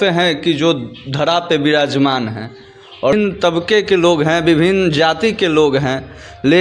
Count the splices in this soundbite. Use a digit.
1